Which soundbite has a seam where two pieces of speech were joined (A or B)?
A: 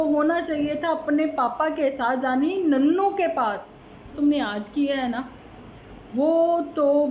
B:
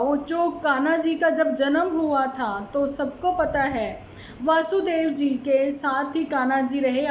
A